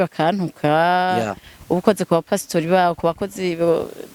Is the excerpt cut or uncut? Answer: uncut